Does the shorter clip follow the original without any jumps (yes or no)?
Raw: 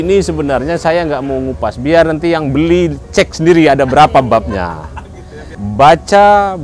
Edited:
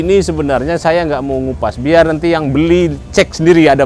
yes